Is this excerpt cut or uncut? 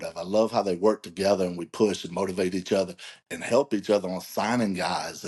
uncut